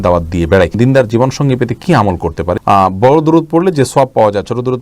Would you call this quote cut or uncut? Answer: cut